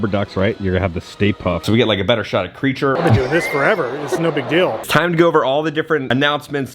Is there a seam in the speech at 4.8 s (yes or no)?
yes